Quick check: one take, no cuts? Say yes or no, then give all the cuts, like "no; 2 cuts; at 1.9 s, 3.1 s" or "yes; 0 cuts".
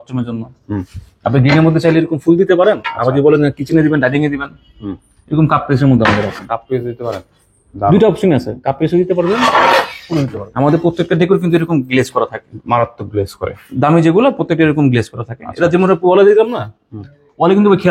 no; 1 cut; at 10.4 s